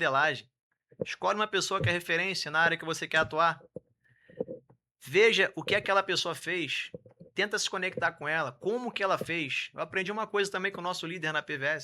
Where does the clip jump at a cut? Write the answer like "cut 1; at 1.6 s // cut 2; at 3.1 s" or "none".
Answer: none